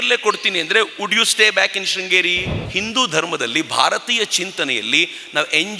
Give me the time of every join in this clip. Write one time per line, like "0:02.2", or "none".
0:02.6